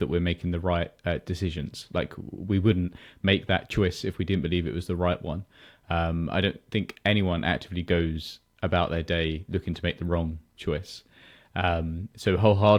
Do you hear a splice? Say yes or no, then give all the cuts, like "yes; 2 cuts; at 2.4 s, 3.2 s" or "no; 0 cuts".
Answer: no; 0 cuts